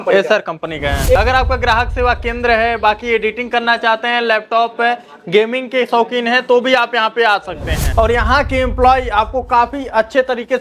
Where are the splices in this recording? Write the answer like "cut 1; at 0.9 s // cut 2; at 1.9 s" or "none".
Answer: cut 1; at 1.2 s // cut 2; at 7.8 s